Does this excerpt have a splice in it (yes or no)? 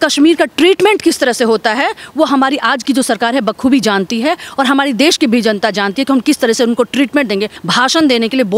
yes